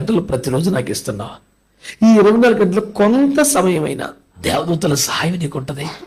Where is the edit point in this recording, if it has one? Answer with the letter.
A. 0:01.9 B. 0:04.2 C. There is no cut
B